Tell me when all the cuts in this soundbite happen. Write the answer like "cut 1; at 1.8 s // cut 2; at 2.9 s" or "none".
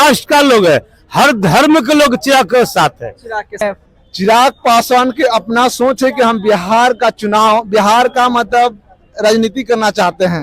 cut 1; at 3.5 s